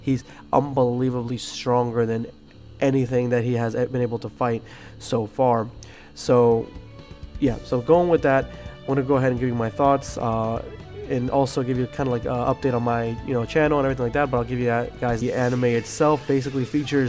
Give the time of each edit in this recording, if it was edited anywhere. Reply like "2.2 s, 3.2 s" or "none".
none